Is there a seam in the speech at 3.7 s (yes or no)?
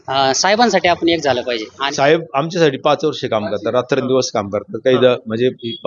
no